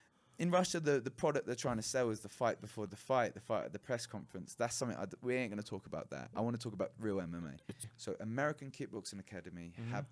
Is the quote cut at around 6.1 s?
no; 1 cut; at 7.9 s

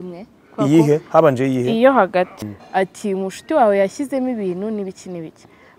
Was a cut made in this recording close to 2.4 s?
yes; 1 cut; at 2.4 s

